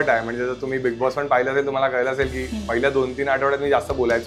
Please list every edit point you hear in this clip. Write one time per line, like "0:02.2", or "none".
none